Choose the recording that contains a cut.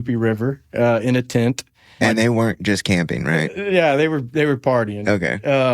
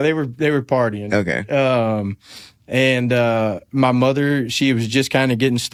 first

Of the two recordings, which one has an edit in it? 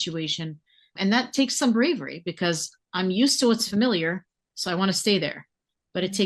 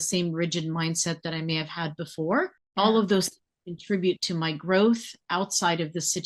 second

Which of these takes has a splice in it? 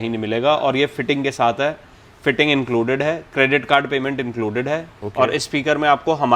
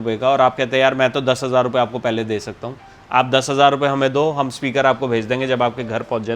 first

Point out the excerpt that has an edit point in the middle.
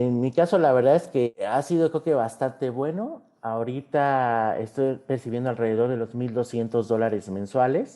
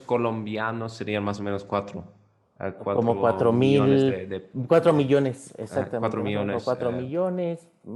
first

